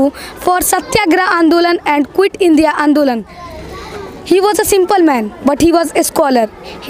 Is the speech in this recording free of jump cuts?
yes; 0 cuts

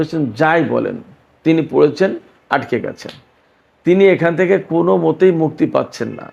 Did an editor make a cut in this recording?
no; 0 cuts

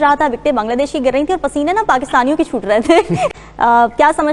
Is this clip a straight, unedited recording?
no; 1 cut; at 3.3 s

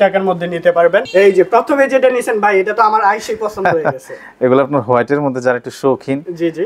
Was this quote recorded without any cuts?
no; 1 cut; at 1.1 s

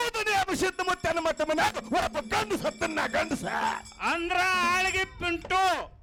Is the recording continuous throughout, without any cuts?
yes; 0 cuts

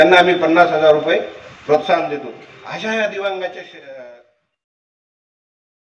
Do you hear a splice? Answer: no; 0 cuts

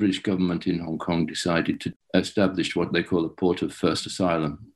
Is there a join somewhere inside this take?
yes; 1 cut; at 1.8 s

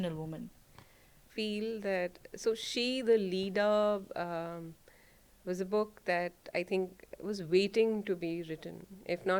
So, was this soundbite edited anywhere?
yes; 1 cut; at 1.2 s

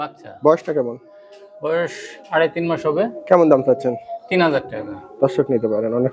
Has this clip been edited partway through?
no; 0 cuts

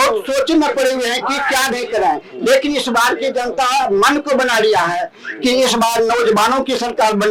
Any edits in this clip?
no; 0 cuts

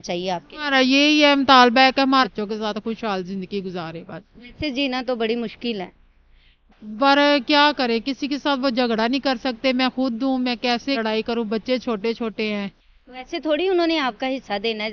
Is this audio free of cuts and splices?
no; 2 cuts; at 2.2 s, 11.0 s

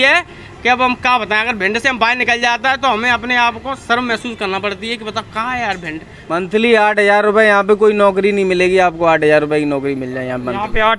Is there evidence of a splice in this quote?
yes; 1 cut; at 6.2 s

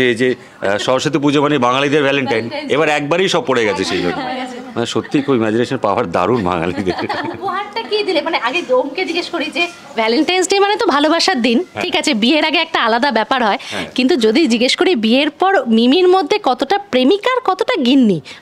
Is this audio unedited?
yes; 0 cuts

